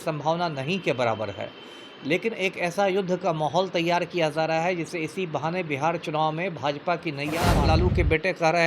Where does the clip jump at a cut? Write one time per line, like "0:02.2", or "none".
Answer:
0:07.5